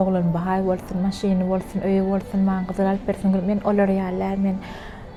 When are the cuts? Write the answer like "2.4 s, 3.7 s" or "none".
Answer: none